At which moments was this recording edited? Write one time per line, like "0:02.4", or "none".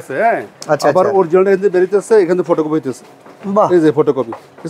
none